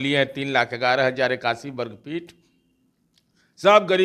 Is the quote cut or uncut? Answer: uncut